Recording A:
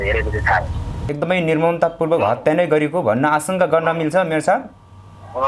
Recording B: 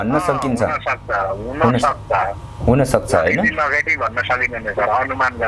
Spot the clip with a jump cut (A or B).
A